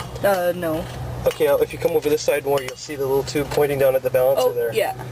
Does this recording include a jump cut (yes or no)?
yes